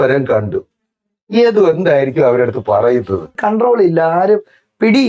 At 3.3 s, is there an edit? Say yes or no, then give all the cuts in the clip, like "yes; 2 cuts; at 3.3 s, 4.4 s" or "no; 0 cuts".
yes; 1 cut; at 3.3 s